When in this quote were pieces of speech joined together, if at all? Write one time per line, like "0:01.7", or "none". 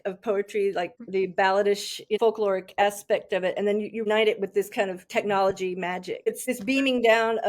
0:00.9
0:02.2
0:04.0
0:06.4